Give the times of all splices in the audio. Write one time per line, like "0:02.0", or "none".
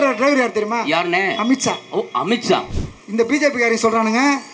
0:02.7